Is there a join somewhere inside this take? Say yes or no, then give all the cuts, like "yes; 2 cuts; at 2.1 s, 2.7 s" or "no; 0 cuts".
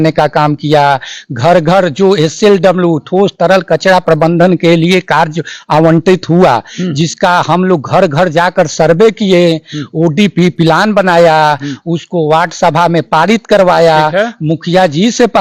no; 0 cuts